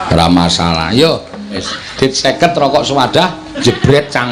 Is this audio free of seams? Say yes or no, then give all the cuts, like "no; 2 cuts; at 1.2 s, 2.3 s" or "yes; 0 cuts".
no; 1 cut; at 1.6 s